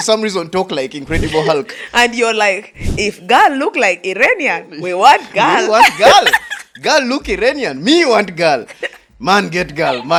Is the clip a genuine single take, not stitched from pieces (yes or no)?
yes